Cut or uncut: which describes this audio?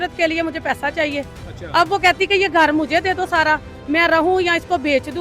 uncut